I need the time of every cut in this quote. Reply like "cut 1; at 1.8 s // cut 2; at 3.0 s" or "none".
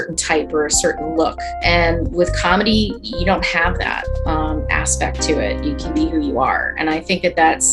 cut 1; at 1.6 s